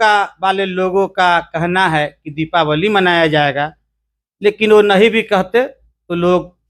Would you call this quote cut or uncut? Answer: uncut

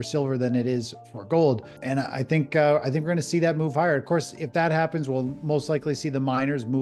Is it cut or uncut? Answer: cut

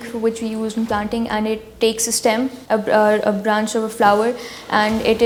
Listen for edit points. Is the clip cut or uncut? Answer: uncut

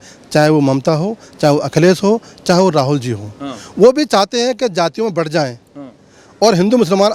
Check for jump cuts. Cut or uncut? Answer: uncut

